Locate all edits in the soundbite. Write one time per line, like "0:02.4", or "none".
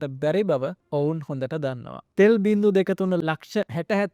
0:02.0

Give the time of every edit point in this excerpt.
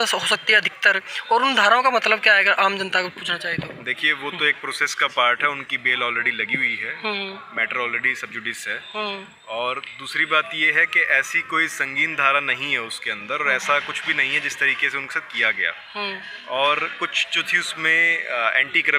none

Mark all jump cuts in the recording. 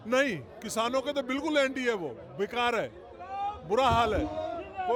none

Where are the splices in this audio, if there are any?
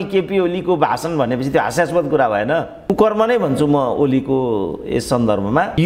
0:02.9

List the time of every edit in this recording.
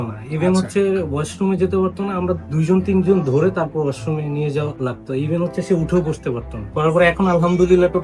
0:06.7

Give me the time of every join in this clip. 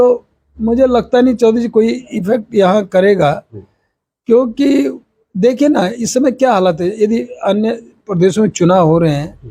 none

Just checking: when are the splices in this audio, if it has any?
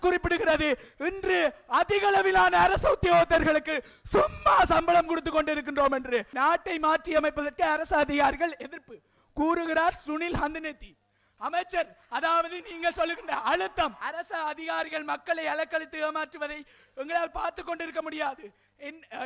0:06.3
0:14.0

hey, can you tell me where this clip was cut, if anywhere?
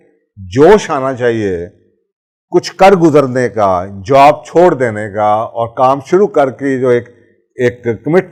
none

